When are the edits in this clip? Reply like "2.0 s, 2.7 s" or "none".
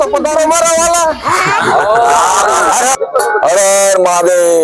3.0 s